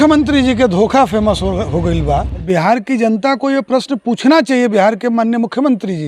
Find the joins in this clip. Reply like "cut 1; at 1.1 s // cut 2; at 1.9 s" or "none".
cut 1; at 2.3 s